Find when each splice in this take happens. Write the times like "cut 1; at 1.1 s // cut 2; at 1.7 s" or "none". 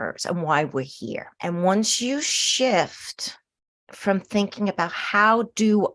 cut 1; at 1.3 s